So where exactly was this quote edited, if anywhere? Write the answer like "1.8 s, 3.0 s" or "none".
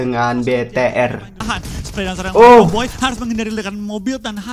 1.4 s